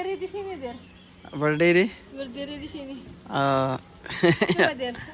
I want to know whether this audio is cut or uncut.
uncut